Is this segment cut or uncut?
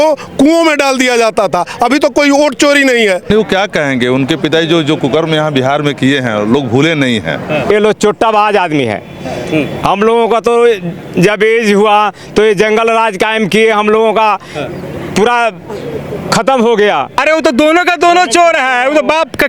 cut